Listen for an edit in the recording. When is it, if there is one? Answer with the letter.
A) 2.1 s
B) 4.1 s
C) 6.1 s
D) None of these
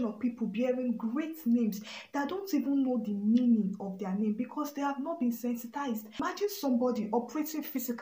C